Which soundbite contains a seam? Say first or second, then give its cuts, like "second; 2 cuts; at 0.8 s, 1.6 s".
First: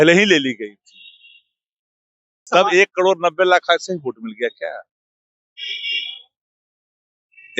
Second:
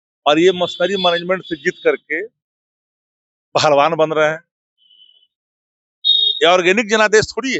first; 1 cut; at 2.5 s